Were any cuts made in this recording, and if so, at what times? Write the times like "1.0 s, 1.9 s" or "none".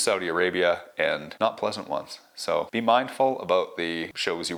none